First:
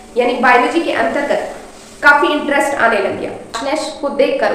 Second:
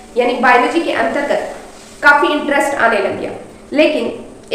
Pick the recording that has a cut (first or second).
first